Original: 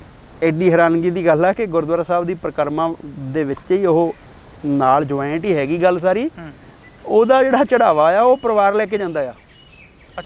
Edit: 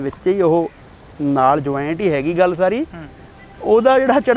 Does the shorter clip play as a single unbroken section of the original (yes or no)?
yes